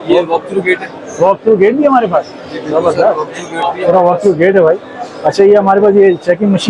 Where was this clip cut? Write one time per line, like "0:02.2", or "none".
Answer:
none